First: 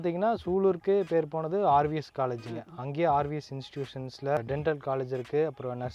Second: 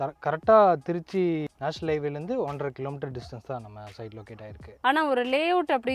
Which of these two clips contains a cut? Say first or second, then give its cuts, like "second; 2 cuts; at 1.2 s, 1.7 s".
second; 1 cut; at 4.6 s